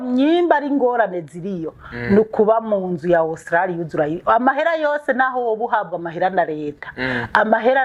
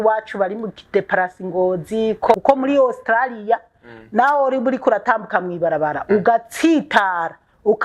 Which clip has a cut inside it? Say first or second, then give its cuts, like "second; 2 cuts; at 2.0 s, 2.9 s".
second; 1 cut; at 2.3 s